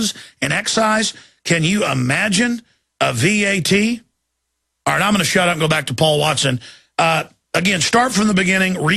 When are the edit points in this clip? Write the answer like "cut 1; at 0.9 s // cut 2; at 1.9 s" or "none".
cut 1; at 2.3 s